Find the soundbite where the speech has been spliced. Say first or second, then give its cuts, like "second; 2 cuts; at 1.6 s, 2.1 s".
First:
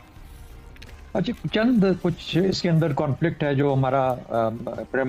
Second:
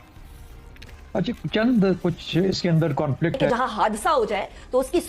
second; 1 cut; at 3.4 s